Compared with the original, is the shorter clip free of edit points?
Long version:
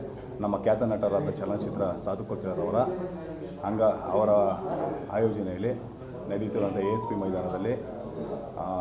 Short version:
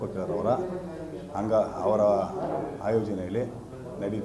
yes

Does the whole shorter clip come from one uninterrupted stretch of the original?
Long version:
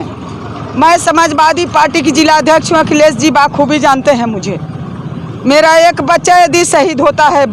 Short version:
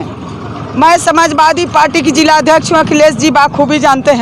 yes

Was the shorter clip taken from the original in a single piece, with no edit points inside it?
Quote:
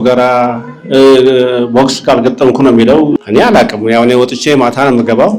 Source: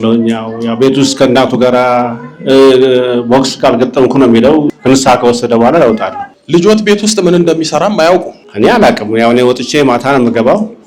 no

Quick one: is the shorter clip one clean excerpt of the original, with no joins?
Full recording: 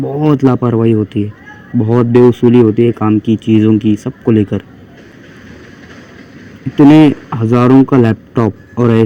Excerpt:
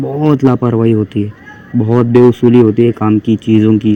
yes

